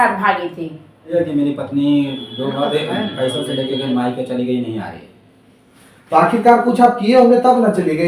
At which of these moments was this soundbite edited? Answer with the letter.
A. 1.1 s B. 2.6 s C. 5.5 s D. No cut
A